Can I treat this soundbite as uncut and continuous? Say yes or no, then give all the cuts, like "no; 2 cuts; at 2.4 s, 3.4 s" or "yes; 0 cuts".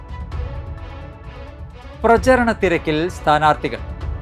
yes; 0 cuts